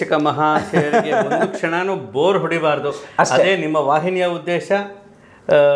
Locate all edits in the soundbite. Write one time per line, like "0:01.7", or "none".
none